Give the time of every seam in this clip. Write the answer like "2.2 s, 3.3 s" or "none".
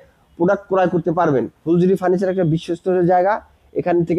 1.5 s